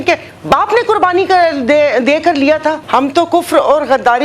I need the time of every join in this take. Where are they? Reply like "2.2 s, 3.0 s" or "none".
2.8 s